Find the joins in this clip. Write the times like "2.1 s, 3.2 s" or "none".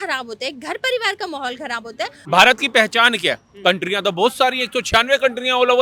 2.2 s